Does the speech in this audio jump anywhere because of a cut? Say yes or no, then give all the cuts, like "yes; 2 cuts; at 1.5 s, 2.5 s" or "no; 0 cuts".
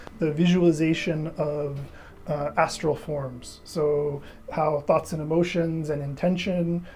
no; 0 cuts